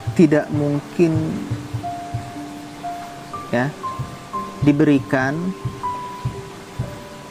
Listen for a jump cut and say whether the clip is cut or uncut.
uncut